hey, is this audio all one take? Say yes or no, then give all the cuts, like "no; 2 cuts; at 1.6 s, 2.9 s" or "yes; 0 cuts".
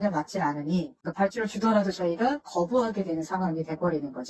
yes; 0 cuts